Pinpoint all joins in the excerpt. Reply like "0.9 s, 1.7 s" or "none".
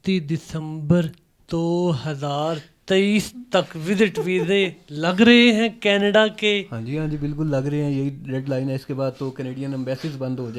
none